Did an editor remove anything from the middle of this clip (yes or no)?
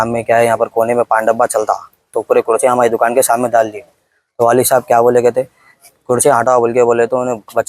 yes